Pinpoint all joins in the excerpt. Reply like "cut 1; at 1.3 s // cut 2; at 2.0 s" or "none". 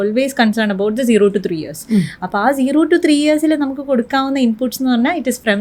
none